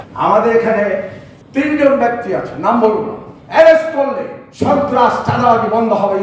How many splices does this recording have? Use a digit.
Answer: 0